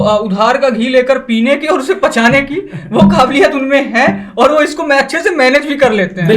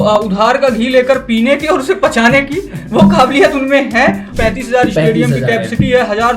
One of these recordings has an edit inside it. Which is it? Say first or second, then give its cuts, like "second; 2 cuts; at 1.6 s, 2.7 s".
second; 1 cut; at 4.3 s